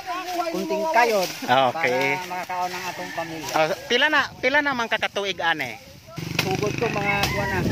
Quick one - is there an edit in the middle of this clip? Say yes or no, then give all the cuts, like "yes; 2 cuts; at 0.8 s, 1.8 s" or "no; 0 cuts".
yes; 1 cut; at 6.2 s